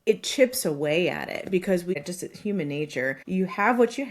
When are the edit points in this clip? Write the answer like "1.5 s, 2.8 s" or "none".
1.9 s, 3.2 s

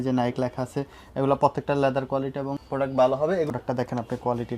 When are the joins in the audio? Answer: 3.5 s

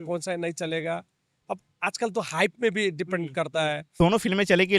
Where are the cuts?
3.9 s

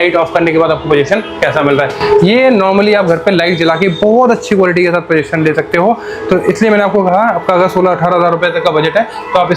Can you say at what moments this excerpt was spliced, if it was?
none

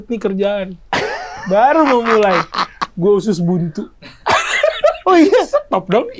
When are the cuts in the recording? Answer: none

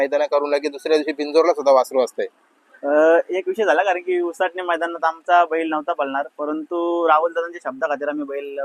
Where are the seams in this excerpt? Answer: none

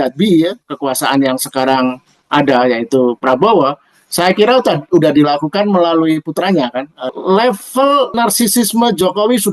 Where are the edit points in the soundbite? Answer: 7.1 s, 8.1 s

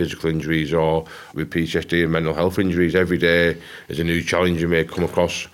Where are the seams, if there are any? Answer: 1.2 s

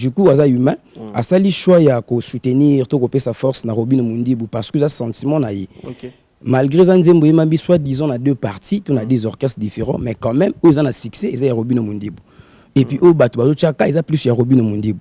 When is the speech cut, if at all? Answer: none

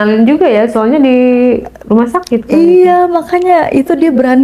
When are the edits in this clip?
none

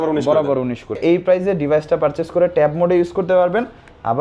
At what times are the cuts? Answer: 1.0 s

